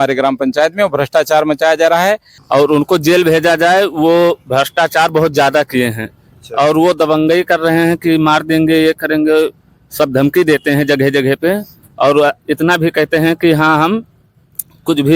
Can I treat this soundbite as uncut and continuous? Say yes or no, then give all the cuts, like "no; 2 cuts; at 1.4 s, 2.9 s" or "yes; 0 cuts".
no; 1 cut; at 2.3 s